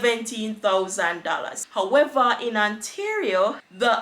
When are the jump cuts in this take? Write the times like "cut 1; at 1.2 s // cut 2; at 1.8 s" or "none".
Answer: cut 1; at 1.6 s

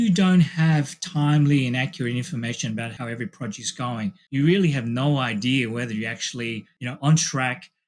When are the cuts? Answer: cut 1; at 2.9 s

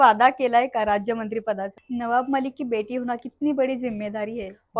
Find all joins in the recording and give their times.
cut 1; at 1.7 s

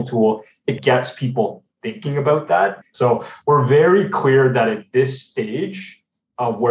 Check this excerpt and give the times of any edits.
cut 1; at 2.8 s

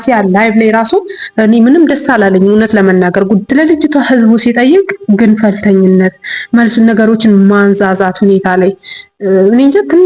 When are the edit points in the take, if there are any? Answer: cut 1; at 3.5 s

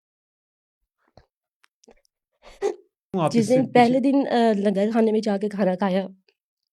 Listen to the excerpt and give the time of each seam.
cut 1; at 3.1 s

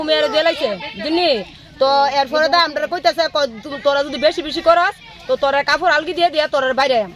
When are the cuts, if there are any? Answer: none

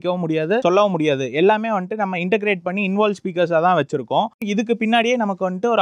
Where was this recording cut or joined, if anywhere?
cut 1; at 4.4 s

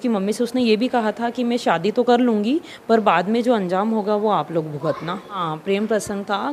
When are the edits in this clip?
cut 1; at 5.4 s

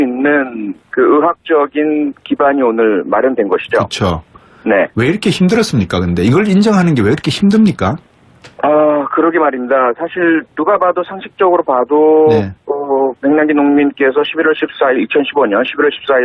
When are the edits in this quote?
cut 1; at 6.2 s

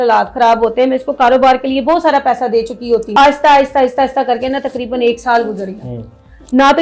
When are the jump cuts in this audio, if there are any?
cut 1; at 3.1 s

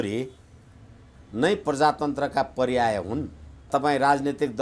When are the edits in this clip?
cut 1; at 3.7 s

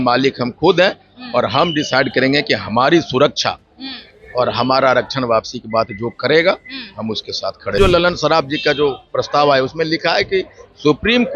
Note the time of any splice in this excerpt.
cut 1; at 7.8 s

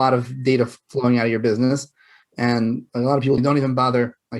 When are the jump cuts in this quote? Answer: cut 1; at 3.4 s

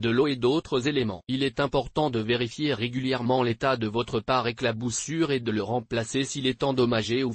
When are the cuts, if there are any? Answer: cut 1; at 1.2 s

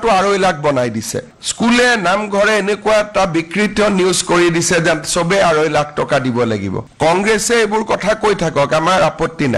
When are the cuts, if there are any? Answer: cut 1; at 1.3 s // cut 2; at 6.8 s

